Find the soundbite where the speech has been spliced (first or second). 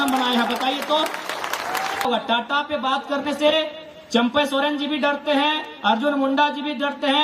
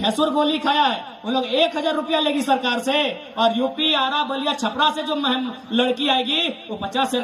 first